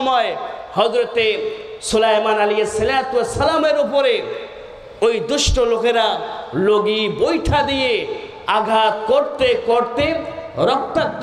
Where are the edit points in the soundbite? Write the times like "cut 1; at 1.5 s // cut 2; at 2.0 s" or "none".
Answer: none